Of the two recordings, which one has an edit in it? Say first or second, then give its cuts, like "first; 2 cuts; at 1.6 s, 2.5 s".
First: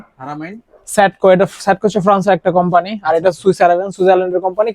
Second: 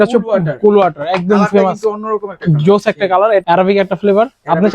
second; 1 cut; at 3.4 s